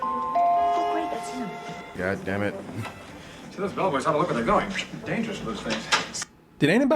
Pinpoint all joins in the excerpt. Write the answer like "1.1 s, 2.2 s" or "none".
2.0 s